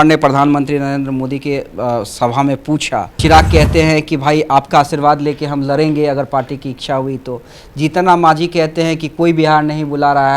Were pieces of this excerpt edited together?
yes; 1 cut; at 3.1 s

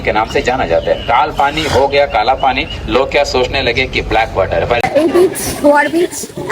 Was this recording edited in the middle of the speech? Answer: yes; 1 cut; at 4.9 s

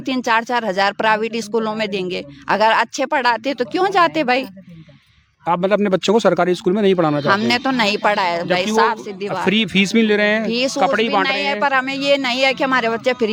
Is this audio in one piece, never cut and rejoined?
yes; 0 cuts

